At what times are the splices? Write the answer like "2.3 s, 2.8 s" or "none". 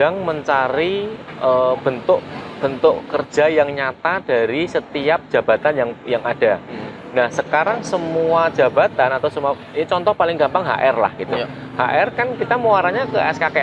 none